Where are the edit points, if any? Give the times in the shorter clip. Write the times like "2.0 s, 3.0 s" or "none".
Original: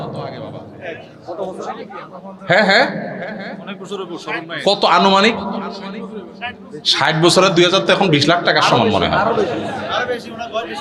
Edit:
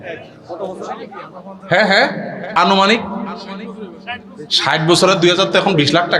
2.5 s